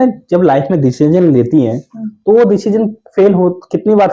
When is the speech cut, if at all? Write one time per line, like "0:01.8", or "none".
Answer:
none

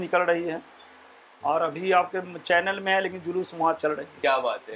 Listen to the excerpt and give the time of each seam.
none

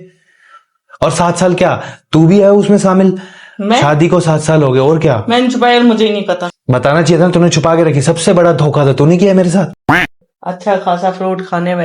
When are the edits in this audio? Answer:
0:06.5
0:09.7

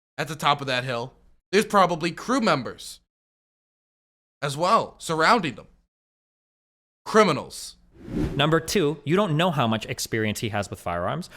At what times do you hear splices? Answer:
0:08.2

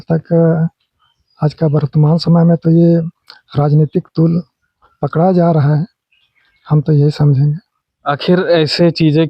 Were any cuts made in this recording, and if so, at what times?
none

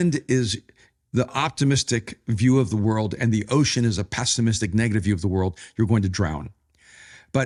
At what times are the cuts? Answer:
none

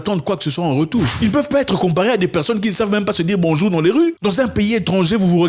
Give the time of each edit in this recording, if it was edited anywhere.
0:01.1

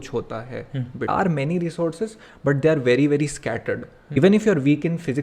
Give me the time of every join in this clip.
0:01.1
0:04.2

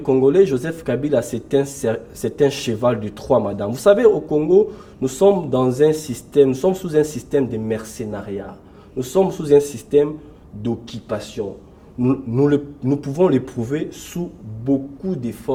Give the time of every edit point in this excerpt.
none

